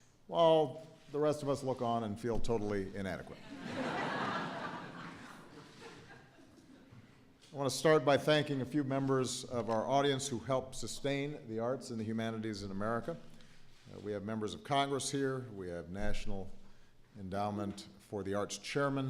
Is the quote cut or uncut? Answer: cut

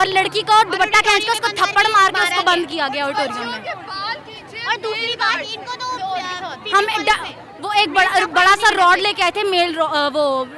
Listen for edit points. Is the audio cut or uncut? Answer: uncut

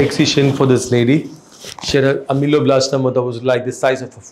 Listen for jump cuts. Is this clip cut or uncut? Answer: uncut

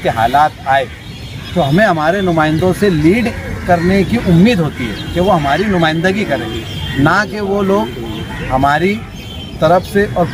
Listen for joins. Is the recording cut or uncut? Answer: uncut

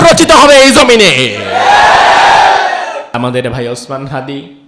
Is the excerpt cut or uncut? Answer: cut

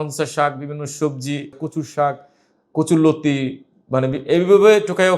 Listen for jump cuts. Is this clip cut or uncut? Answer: cut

